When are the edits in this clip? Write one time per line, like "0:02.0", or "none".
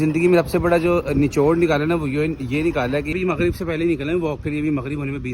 0:03.1